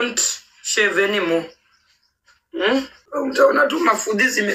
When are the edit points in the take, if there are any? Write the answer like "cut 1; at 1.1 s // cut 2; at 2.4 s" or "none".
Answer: cut 1; at 2.8 s